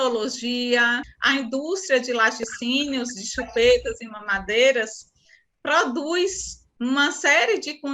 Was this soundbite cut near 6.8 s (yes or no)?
no